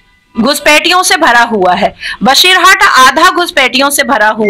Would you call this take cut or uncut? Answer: uncut